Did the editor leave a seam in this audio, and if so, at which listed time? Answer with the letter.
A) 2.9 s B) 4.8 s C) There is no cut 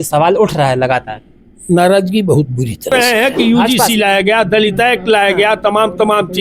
A